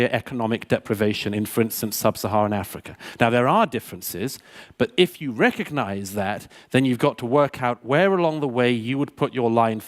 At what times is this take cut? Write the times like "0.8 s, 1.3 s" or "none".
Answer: none